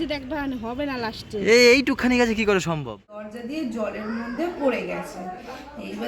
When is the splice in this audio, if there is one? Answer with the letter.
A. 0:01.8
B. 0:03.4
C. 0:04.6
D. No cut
B